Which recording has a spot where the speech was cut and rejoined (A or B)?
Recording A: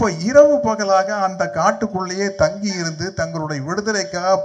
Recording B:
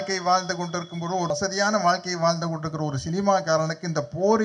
B